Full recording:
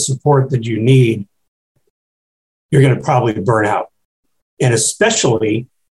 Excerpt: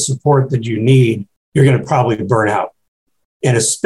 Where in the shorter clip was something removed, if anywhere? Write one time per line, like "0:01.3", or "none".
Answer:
0:01.3